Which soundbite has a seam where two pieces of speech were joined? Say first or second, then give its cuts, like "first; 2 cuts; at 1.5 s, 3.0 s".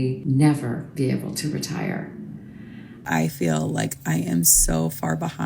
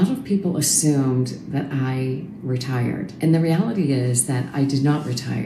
first; 1 cut; at 3.0 s